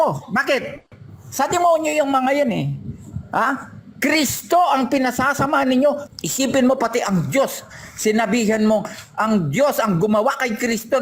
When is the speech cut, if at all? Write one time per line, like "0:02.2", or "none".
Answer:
0:06.0